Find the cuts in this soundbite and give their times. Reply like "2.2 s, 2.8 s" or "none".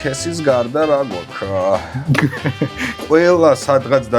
3.0 s